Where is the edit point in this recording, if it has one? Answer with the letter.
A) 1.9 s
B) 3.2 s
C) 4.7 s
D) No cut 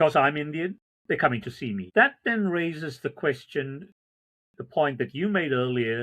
A